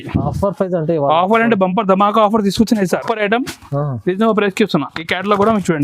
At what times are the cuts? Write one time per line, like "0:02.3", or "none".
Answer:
0:02.9